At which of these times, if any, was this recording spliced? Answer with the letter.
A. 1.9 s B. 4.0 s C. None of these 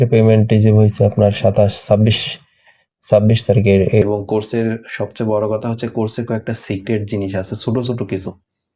B